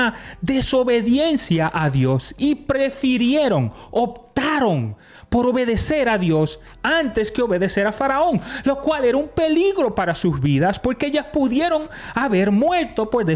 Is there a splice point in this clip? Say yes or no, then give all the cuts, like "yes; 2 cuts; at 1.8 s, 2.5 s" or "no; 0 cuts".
no; 0 cuts